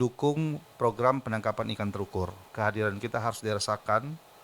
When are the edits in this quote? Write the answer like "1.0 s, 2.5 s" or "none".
2.5 s